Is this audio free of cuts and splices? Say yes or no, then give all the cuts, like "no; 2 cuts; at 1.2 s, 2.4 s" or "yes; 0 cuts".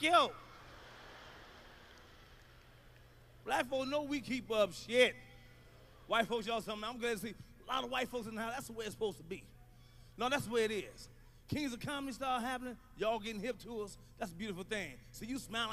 no; 1 cut; at 1.9 s